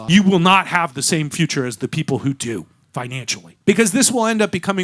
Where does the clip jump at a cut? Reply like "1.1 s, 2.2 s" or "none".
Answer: 3.5 s